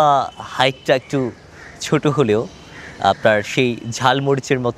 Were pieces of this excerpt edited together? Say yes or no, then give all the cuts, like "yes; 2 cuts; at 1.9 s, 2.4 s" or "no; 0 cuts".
no; 0 cuts